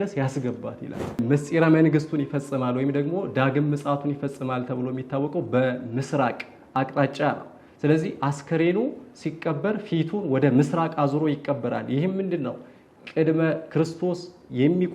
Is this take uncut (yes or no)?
no